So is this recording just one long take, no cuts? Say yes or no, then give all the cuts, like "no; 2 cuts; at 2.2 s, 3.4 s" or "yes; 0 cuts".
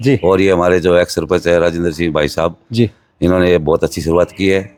yes; 0 cuts